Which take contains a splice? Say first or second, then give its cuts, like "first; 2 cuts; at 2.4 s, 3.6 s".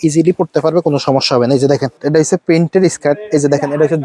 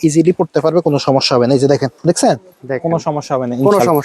first; 1 cut; at 2.0 s